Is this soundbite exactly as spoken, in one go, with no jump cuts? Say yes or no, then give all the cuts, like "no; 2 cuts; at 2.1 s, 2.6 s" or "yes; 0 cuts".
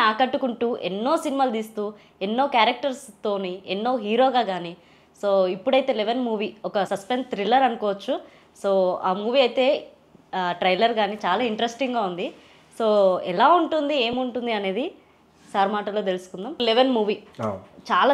no; 1 cut; at 16.6 s